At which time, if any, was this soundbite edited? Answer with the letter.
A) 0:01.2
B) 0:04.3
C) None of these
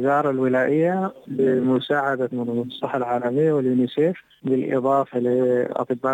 B